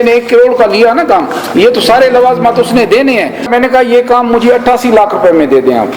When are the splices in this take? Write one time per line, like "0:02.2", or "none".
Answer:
0:03.5